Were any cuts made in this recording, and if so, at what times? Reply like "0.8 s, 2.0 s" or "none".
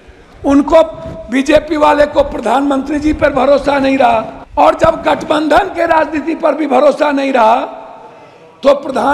4.4 s